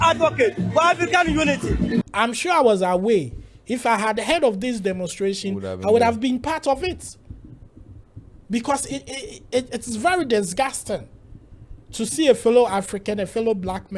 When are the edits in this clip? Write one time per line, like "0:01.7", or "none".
0:02.1